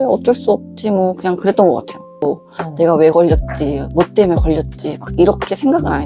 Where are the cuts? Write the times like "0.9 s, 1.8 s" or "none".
2.2 s